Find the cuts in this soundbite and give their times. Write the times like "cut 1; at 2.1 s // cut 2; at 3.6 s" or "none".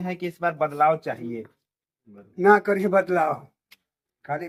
none